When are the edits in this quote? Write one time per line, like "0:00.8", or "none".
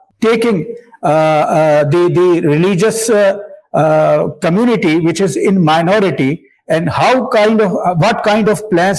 none